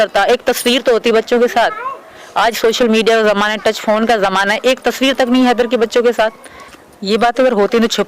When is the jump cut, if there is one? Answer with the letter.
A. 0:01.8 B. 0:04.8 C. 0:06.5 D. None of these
C